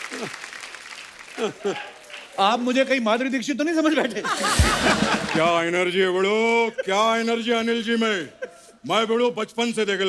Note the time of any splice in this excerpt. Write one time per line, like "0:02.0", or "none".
0:05.3